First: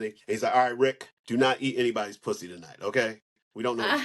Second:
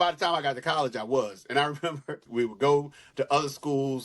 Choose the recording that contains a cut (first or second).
second